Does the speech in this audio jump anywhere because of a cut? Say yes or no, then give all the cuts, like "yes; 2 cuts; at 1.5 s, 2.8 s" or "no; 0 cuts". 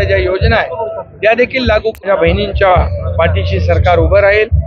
yes; 1 cut; at 2.1 s